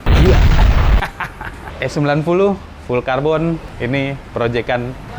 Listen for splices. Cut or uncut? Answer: cut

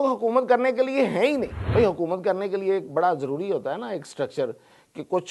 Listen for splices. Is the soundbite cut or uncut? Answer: cut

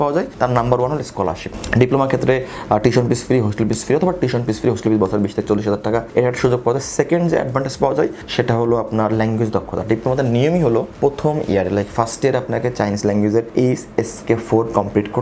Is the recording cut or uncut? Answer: uncut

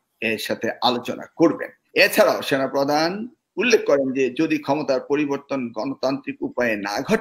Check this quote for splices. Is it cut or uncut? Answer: cut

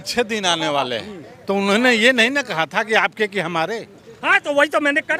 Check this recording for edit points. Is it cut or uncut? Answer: uncut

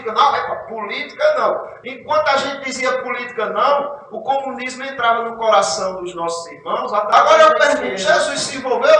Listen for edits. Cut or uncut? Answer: cut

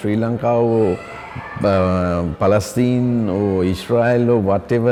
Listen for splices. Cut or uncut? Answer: uncut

